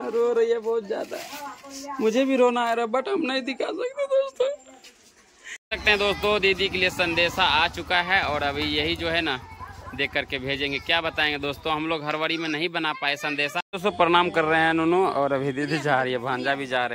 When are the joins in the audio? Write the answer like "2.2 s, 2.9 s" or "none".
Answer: 5.6 s, 13.7 s